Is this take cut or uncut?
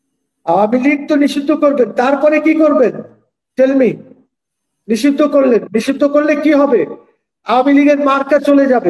uncut